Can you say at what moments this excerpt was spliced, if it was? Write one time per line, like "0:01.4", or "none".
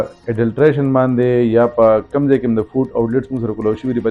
none